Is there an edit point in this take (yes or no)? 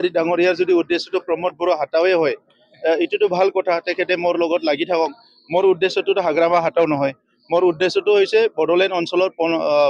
no